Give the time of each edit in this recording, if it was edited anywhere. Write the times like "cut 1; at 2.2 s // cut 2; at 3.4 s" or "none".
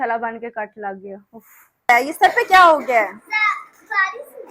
cut 1; at 1.9 s